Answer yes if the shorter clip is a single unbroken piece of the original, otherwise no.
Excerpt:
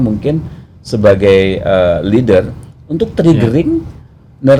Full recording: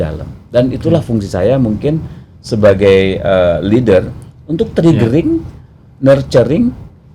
yes